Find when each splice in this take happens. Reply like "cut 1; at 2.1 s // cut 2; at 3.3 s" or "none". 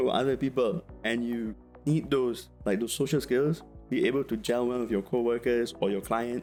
none